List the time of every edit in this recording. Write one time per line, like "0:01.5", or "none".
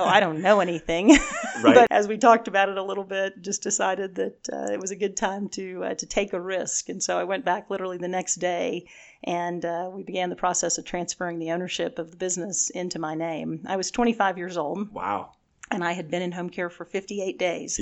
0:01.9